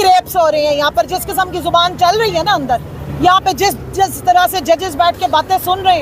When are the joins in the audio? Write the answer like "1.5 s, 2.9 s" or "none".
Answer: 3.0 s